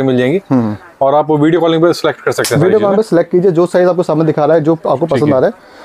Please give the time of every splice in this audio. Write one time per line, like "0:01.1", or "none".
none